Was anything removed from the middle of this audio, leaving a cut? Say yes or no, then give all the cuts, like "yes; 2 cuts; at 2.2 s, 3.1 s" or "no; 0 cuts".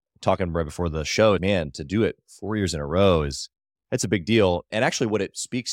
yes; 2 cuts; at 1.4 s, 4.7 s